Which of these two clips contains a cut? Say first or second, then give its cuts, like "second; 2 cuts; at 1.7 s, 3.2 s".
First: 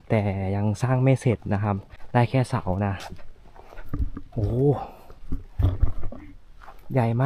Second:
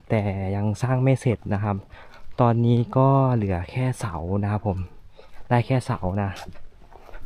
first; 1 cut; at 1.9 s